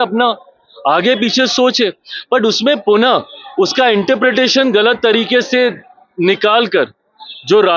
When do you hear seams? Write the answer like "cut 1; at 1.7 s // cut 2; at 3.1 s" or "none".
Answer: none